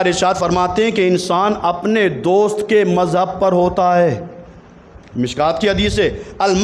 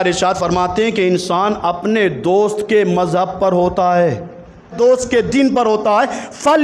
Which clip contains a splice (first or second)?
second